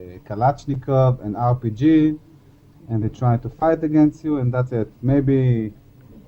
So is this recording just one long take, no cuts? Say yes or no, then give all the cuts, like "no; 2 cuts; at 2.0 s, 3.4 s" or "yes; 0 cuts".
yes; 0 cuts